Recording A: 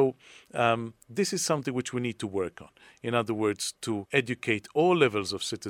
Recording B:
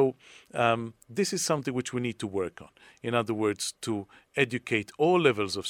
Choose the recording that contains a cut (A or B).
A